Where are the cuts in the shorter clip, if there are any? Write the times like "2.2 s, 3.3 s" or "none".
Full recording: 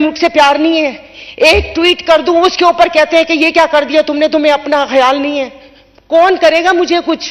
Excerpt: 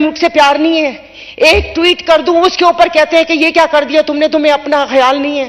none